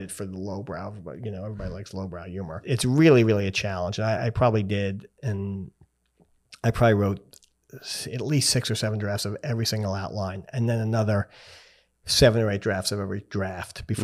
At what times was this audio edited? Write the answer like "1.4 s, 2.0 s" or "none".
2.7 s